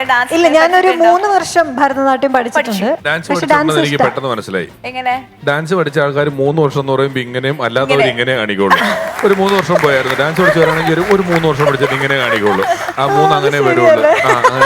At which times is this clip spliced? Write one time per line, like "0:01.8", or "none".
0:03.0